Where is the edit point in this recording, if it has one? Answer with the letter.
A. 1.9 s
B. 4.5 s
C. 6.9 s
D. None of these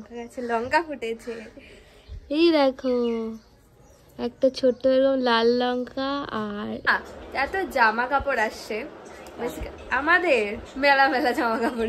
C